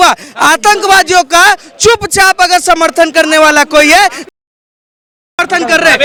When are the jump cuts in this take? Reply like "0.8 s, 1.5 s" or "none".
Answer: none